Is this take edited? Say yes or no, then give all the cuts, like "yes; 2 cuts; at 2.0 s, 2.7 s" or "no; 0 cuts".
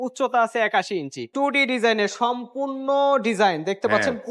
yes; 1 cut; at 1.3 s